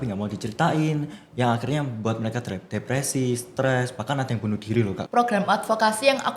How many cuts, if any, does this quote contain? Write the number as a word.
one